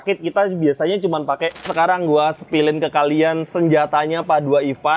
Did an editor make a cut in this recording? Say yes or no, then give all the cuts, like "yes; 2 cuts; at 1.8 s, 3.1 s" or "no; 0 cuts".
yes; 1 cut; at 1.6 s